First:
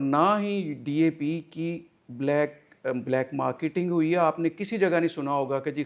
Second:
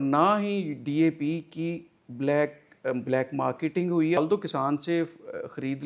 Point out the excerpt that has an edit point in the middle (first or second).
second